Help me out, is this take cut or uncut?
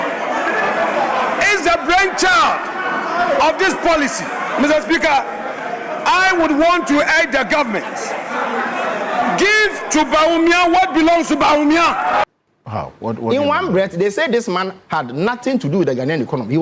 cut